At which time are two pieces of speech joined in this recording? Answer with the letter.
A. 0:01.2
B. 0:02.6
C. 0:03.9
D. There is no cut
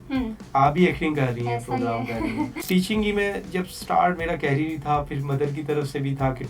B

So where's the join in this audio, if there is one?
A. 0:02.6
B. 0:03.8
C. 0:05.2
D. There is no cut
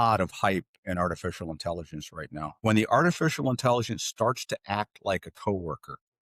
A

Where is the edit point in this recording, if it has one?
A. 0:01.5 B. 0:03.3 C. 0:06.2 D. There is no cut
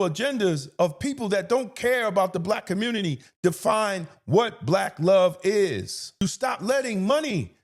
C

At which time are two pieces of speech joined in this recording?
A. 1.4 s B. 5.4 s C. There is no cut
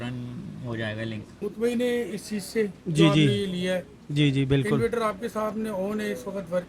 A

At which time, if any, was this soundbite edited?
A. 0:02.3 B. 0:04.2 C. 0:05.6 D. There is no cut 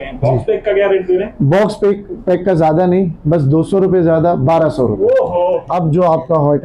C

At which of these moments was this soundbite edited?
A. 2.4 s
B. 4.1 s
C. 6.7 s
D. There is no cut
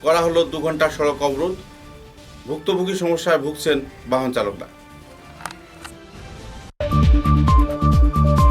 C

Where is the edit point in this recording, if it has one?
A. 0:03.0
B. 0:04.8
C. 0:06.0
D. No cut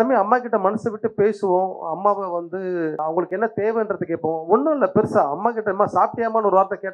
A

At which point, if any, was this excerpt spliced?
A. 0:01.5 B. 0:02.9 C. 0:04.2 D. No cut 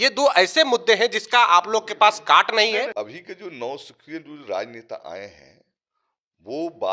B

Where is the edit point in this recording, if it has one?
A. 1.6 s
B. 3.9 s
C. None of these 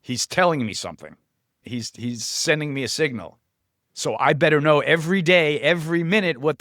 A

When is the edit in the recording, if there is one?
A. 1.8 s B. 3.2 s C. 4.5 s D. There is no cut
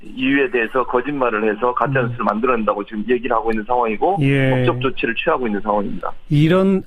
D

